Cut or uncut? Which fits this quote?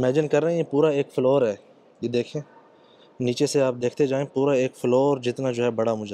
uncut